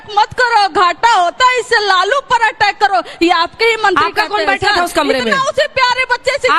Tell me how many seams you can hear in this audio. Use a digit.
1